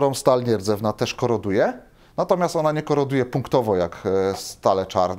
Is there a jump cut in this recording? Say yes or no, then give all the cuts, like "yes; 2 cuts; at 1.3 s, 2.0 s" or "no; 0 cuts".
no; 0 cuts